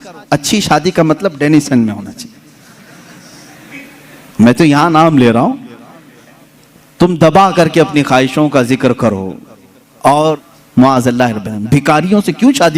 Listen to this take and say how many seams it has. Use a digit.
1